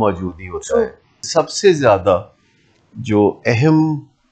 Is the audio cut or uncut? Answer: cut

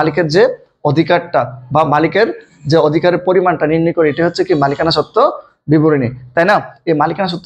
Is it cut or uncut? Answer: uncut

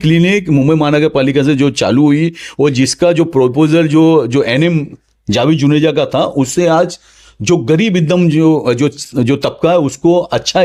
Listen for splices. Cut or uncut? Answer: uncut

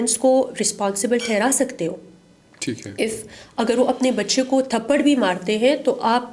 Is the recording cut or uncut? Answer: uncut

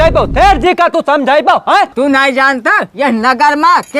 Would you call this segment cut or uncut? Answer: cut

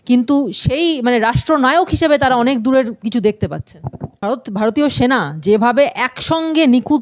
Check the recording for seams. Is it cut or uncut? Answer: cut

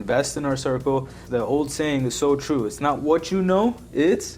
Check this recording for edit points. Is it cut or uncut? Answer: cut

